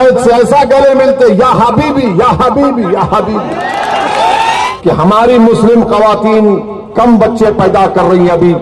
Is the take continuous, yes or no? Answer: no